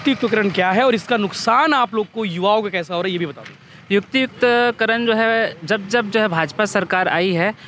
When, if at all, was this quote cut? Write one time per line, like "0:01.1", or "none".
none